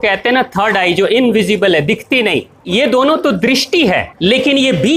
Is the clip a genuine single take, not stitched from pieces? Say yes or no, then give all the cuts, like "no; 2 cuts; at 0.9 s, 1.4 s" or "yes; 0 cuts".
no; 2 cuts; at 2.5 s, 4.1 s